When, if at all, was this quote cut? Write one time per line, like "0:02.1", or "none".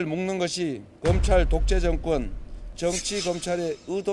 0:02.7